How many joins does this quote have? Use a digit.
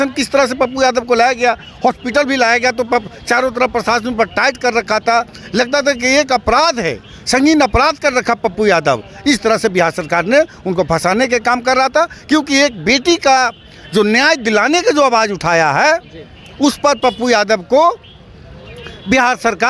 0